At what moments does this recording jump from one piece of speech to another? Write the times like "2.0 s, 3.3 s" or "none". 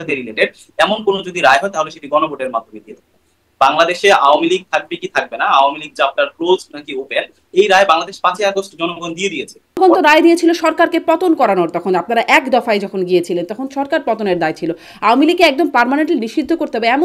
9.8 s

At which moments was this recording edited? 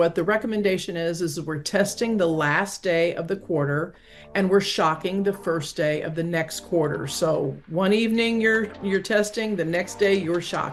none

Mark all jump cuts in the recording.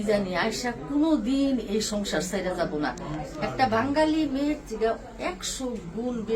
none

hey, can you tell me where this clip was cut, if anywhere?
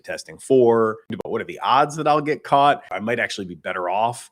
1.2 s, 2.9 s

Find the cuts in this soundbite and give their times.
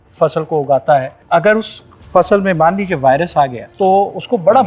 1.2 s, 3.6 s

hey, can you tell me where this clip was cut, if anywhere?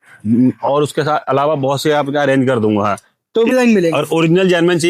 3.5 s

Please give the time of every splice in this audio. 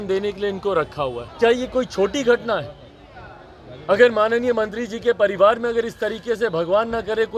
1.2 s

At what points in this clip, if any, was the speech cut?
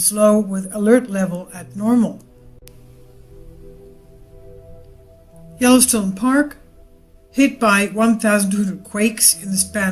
8.3 s

